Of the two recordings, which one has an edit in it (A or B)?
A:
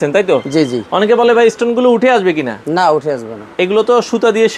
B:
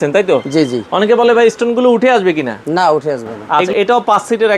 B